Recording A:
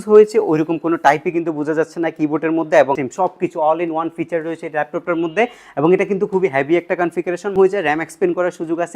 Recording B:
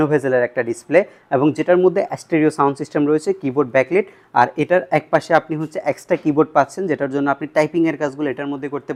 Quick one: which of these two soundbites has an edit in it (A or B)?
A